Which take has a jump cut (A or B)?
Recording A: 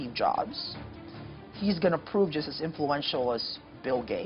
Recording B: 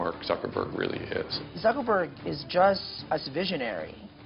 B